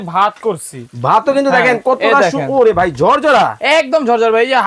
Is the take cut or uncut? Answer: uncut